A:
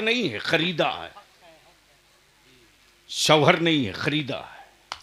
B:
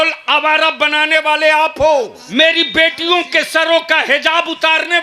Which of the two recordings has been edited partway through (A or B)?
B